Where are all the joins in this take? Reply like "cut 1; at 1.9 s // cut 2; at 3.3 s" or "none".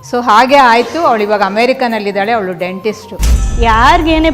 cut 1; at 3.4 s